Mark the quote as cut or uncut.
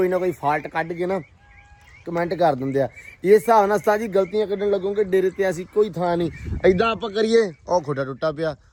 uncut